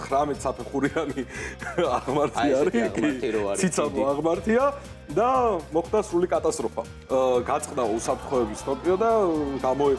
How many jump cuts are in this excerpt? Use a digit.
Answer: 1